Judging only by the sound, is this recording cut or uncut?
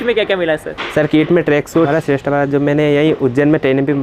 cut